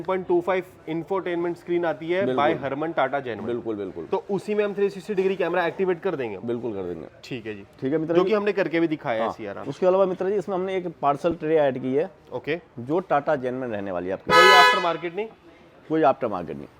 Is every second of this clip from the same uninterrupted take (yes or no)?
yes